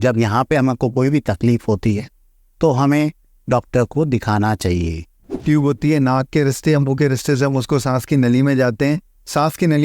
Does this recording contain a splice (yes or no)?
yes